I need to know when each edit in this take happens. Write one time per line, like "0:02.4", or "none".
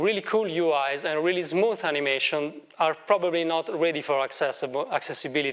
none